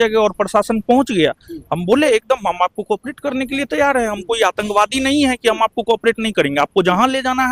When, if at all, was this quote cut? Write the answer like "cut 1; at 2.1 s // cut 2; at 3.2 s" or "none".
none